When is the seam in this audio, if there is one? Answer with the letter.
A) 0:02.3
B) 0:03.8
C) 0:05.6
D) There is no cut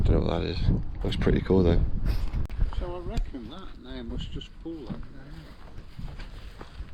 A